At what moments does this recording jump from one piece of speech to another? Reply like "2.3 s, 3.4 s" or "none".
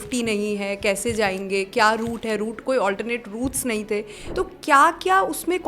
4.2 s